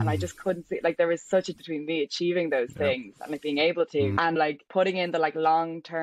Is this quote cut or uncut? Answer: cut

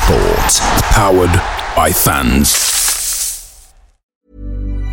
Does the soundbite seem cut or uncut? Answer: cut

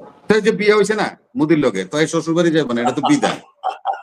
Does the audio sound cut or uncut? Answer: uncut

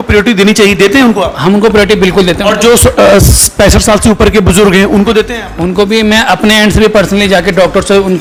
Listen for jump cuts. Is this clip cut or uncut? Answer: uncut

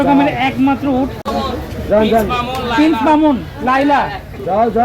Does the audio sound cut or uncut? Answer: cut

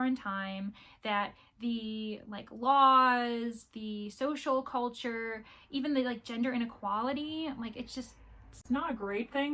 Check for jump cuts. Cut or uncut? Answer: uncut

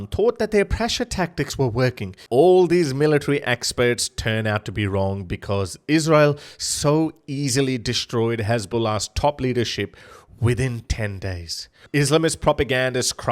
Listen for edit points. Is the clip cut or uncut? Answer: cut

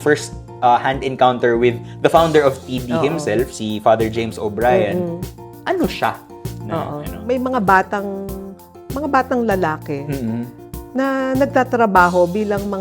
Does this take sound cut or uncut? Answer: cut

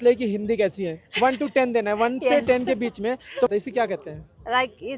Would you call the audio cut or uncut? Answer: uncut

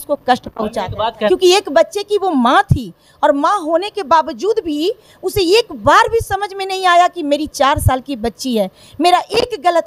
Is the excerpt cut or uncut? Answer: cut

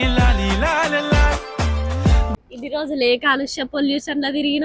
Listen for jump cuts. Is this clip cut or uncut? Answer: cut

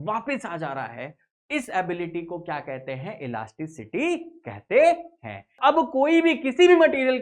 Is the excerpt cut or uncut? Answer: cut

